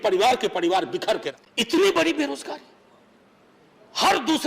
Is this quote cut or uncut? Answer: cut